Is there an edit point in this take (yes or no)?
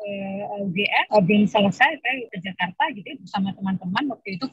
yes